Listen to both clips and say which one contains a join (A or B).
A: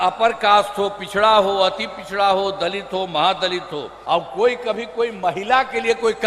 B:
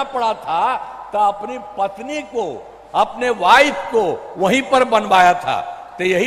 A